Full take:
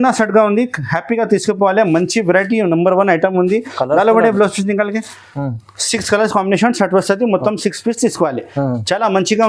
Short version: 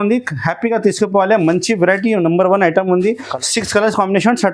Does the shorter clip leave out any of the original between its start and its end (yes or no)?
yes